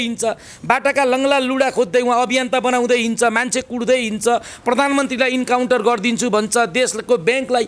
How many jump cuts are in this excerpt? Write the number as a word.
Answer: zero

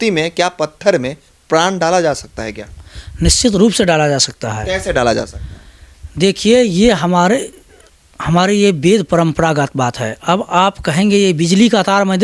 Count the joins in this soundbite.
zero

